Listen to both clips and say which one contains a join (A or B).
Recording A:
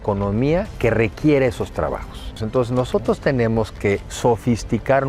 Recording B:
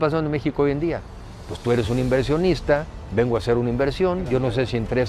A